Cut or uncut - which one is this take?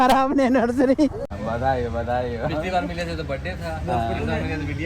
cut